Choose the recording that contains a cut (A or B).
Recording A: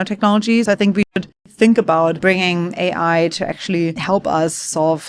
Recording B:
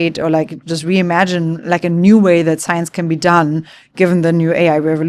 A